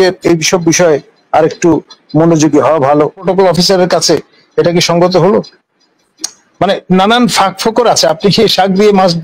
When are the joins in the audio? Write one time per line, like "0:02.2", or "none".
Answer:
0:03.2